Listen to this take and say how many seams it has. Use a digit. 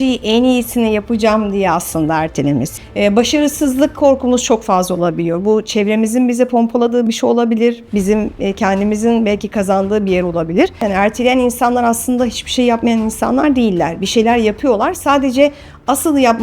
2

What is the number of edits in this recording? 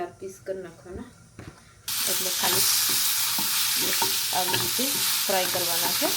1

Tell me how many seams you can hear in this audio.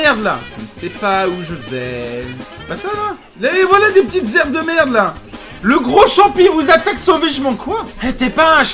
1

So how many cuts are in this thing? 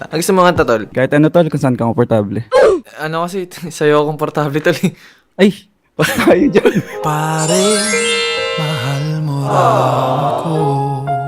0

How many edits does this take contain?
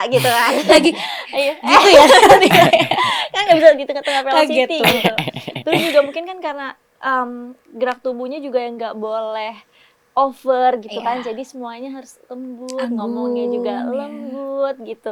0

